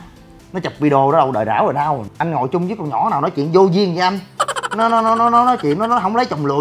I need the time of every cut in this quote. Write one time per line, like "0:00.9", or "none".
0:02.1

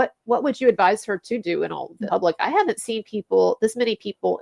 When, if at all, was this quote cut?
0:01.9

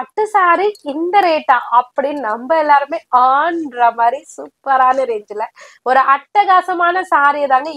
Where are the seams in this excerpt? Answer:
none

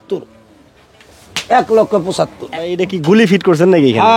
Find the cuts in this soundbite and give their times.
0:02.5

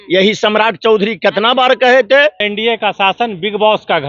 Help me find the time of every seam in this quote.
0:02.5

